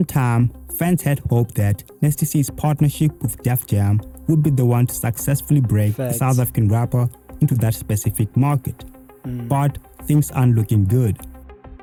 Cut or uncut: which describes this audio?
uncut